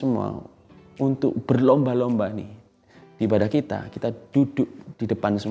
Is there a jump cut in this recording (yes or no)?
no